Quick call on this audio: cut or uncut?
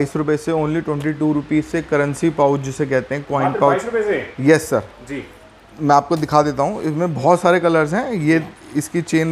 uncut